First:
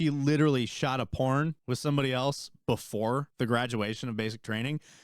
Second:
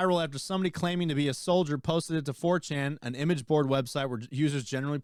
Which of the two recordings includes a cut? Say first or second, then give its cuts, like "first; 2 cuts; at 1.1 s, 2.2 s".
first; 2 cuts; at 1.6 s, 3.3 s